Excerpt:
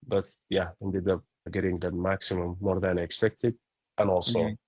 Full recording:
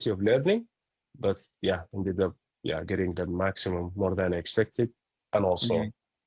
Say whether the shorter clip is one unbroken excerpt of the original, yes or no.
no